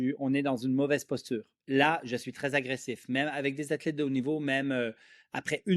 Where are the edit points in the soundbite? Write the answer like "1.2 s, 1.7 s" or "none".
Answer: 1.5 s